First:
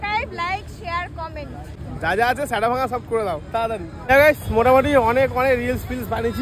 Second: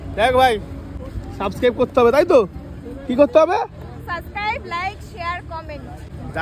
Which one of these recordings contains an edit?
first; 1 cut; at 3.9 s

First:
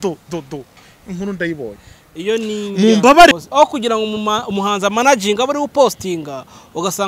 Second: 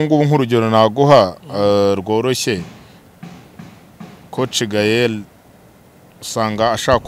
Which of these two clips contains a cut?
first; 1 cut; at 3.3 s

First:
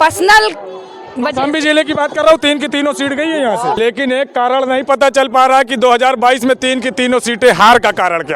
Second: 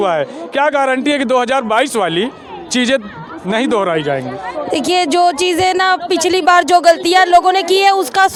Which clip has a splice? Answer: first; 1 cut; at 3.8 s

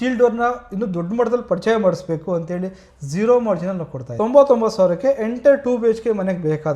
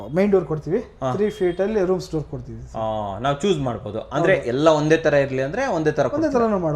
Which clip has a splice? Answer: first; 1 cut; at 4.0 s

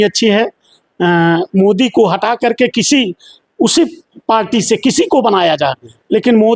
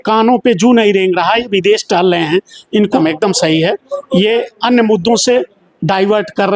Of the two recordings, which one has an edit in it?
second; 1 cut; at 3.0 s

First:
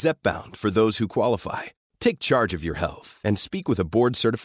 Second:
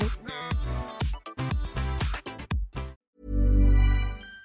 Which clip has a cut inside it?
second; 1 cut; at 3.0 s

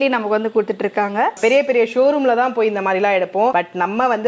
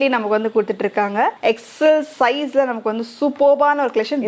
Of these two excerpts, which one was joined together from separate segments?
first; 1 cut; at 1.4 s

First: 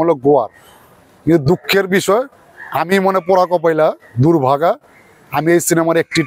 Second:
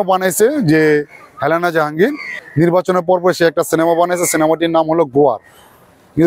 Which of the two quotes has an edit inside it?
second; 1 cut; at 2.4 s

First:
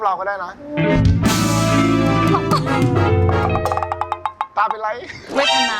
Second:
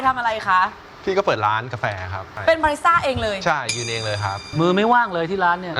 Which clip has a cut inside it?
second; 2 cuts; at 2.3 s, 4.4 s

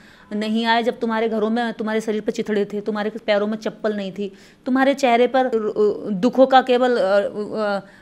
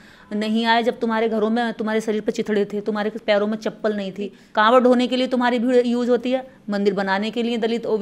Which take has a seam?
second; 1 cut; at 4.3 s

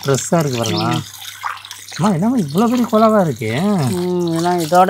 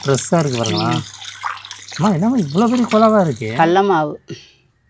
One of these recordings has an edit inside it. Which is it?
second; 1 cut; at 3.4 s

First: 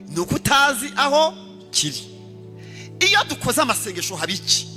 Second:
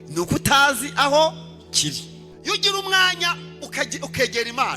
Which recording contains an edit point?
second; 1 cut; at 2.3 s

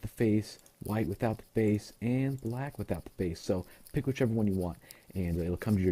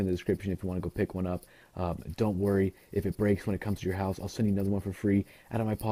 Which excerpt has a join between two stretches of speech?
first; 1 cut; at 2.7 s

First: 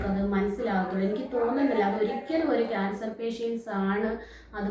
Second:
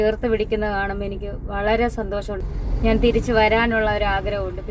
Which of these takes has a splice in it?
second; 1 cut; at 2.4 s

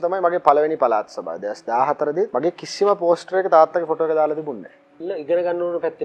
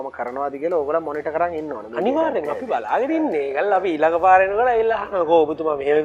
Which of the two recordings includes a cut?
first; 2 cuts; at 2.3 s, 5.0 s

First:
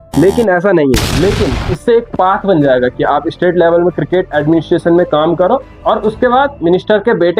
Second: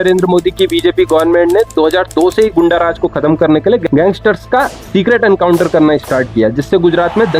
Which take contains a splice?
first; 1 cut; at 1.0 s

